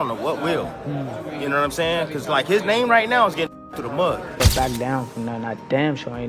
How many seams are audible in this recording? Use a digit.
1